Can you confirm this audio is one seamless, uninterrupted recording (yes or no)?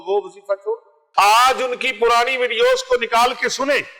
no